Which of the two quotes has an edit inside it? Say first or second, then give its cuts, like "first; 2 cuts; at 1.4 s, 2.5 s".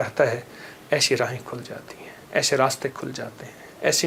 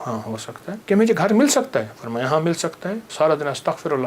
second; 2 cuts; at 0.8 s, 3.0 s